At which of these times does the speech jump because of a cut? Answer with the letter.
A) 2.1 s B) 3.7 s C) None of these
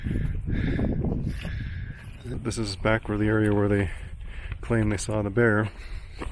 A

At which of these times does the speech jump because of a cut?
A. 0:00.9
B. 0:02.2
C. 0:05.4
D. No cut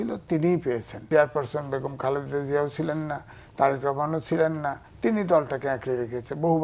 A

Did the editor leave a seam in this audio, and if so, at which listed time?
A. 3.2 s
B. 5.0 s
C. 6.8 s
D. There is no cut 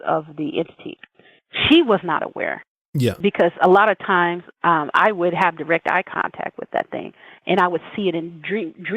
A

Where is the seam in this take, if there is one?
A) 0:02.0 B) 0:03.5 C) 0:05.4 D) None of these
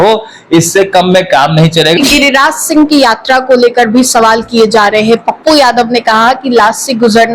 A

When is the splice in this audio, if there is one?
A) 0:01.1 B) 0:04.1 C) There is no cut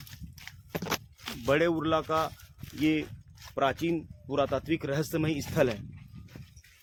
C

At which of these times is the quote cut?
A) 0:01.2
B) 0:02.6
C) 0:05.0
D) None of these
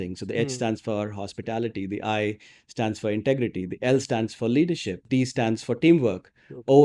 C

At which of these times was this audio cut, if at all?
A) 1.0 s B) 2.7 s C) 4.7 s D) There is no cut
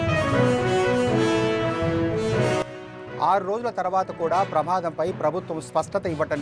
B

